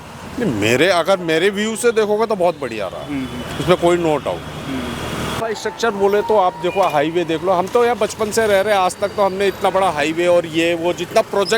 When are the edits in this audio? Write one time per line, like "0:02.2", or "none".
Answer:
0:05.3